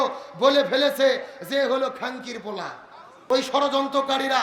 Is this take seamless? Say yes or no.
no